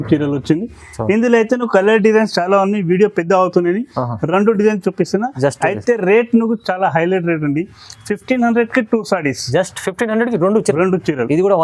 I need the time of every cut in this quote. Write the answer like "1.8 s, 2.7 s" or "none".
none